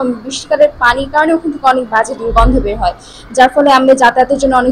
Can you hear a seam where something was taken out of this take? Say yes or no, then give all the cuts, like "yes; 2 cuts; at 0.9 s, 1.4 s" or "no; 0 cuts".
no; 0 cuts